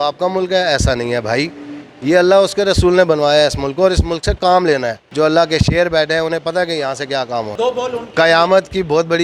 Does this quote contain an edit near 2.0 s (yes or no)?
no